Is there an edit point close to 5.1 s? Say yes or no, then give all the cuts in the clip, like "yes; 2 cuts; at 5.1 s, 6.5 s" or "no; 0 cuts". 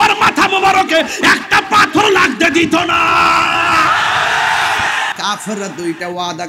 yes; 1 cut; at 5.1 s